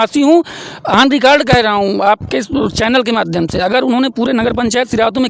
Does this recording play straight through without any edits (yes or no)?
yes